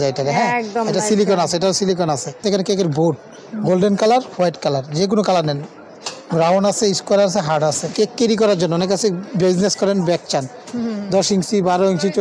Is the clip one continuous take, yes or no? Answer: no